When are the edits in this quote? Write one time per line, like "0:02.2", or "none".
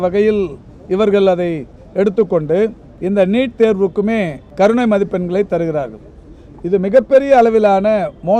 0:02.9
0:04.4